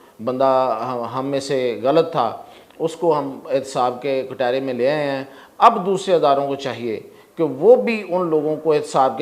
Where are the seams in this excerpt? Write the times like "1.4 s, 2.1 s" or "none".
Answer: none